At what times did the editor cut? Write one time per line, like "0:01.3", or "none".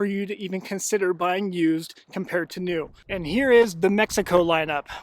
0:03.0